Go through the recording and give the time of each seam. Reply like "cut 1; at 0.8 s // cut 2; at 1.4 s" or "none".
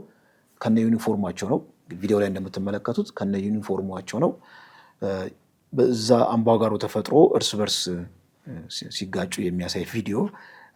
none